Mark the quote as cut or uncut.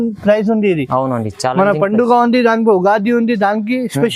uncut